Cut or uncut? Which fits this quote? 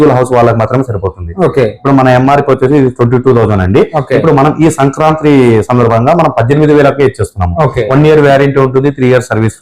uncut